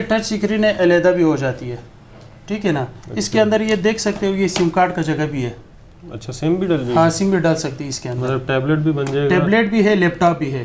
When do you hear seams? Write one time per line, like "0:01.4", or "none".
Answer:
none